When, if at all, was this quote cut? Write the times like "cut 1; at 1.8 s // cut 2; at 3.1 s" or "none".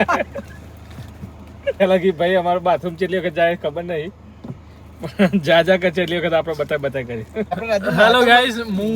cut 1; at 1.8 s // cut 2; at 7.5 s